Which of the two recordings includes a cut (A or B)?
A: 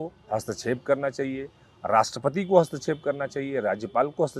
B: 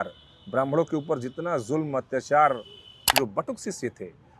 B